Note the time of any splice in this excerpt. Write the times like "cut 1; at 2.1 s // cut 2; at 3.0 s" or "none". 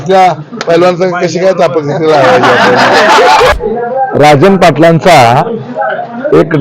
cut 1; at 3.5 s

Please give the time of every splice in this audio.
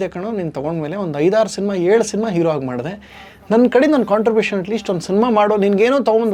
none

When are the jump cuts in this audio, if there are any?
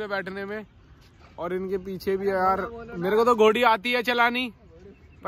none

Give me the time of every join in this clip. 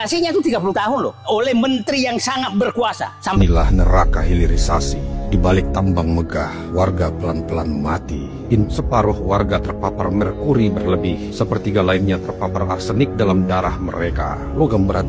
cut 1; at 3.4 s // cut 2; at 8.6 s

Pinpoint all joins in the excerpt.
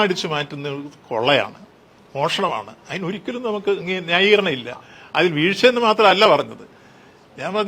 none

